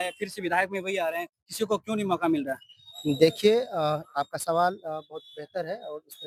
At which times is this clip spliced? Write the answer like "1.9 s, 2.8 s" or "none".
none